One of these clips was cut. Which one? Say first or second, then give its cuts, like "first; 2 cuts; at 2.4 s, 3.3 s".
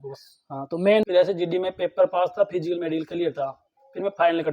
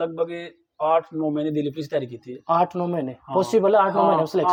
first; 1 cut; at 1.1 s